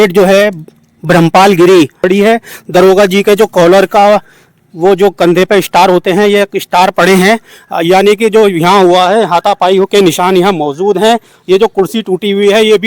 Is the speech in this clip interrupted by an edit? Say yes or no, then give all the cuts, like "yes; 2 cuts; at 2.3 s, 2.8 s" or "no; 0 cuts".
yes; 1 cut; at 2.0 s